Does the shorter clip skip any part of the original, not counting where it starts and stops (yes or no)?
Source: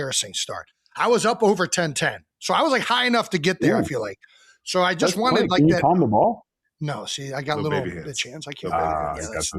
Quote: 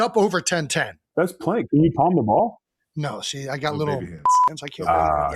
yes